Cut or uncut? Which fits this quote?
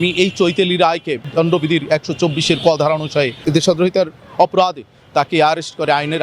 cut